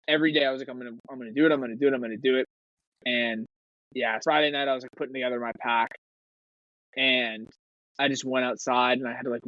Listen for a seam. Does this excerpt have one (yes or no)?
yes